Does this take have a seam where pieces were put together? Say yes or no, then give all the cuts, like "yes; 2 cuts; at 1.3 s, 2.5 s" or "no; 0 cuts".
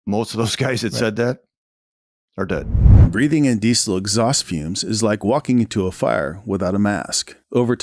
yes; 1 cut; at 2.7 s